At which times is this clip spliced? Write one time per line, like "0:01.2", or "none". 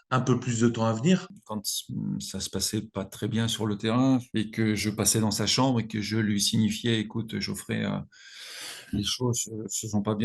0:01.3
0:04.3